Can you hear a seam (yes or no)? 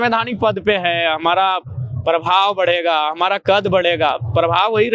no